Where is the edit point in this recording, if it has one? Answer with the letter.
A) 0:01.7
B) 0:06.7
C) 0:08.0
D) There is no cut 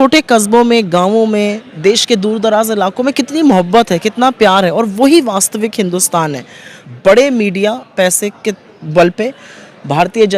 B